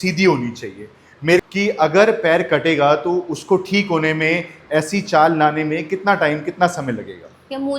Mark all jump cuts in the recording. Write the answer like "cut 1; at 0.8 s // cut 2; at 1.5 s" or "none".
cut 1; at 1.4 s